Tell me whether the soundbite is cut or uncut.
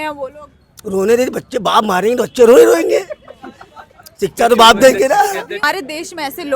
cut